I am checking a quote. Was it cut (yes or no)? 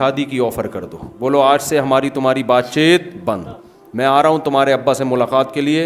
no